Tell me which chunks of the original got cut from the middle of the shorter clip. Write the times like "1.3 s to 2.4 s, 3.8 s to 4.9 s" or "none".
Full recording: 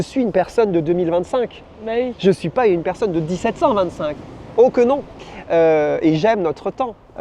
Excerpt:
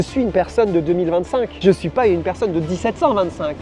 1.6 s to 2.2 s